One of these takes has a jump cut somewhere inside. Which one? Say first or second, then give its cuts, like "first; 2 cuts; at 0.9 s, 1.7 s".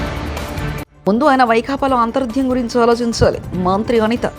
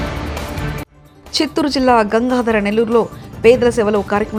first; 1 cut; at 0.9 s